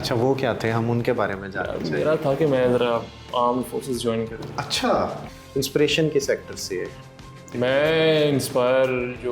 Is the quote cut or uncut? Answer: cut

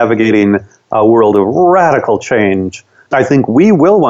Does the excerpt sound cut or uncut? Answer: uncut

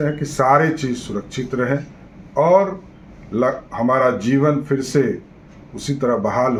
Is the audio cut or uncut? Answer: uncut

